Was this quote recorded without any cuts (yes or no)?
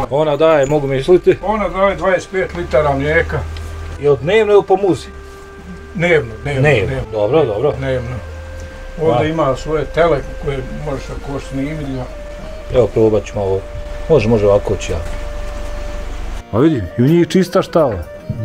no